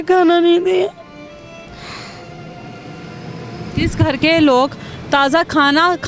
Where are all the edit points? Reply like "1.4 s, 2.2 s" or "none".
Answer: none